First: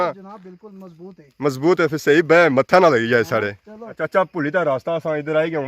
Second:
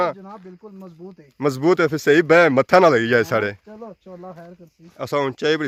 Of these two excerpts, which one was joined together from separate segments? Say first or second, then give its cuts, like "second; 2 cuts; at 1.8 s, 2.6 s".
first; 1 cut; at 4.0 s